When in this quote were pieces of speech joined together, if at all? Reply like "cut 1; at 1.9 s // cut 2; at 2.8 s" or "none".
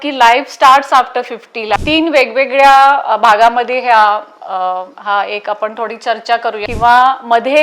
cut 1; at 1.7 s // cut 2; at 6.6 s